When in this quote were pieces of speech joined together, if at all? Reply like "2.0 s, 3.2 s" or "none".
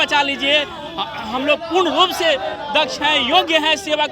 none

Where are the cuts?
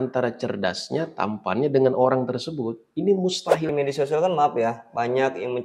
3.7 s

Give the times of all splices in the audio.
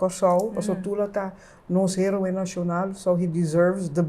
none

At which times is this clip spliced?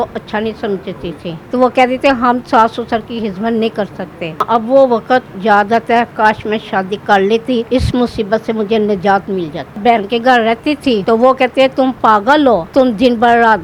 1.4 s, 4.4 s, 7.7 s, 9.8 s, 11.0 s, 12.7 s

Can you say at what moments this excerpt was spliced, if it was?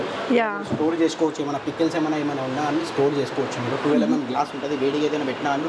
none

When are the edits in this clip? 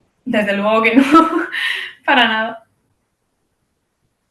none

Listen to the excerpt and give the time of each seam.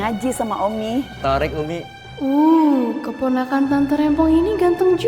1.1 s, 2.0 s

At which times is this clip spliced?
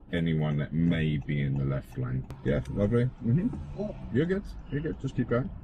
2.2 s

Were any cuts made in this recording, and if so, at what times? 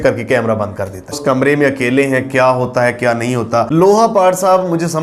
1.2 s, 3.7 s

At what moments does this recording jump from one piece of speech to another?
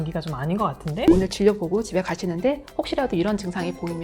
1.1 s

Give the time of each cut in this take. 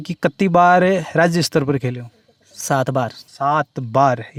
none

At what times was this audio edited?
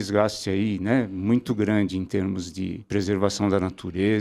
2.8 s

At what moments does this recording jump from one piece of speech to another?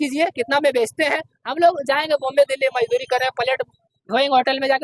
none

